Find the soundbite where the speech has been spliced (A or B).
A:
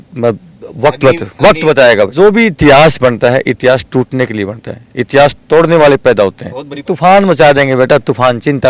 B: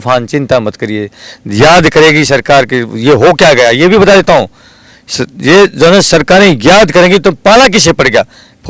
A